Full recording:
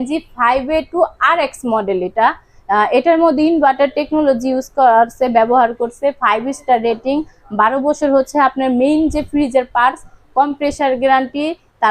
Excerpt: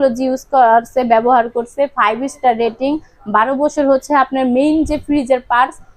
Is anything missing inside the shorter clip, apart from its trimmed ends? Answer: no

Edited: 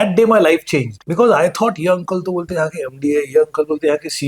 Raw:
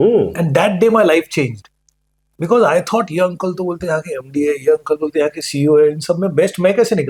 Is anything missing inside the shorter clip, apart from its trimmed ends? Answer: yes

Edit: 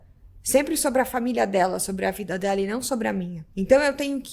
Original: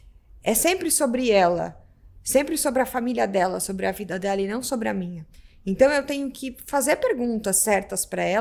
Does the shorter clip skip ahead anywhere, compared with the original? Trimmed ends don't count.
yes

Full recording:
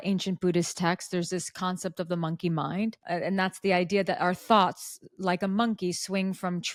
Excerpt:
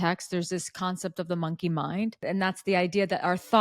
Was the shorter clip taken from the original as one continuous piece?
no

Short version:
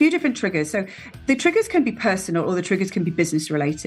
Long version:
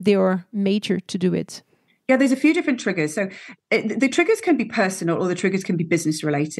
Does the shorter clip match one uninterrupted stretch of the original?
no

